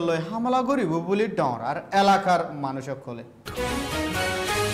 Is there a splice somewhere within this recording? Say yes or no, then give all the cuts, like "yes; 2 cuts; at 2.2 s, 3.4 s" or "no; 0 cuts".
no; 0 cuts